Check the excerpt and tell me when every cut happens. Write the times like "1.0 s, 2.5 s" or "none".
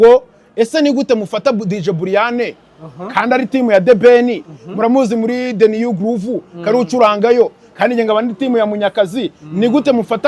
none